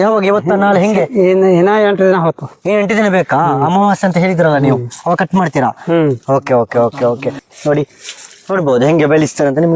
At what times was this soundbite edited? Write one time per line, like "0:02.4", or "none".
0:07.4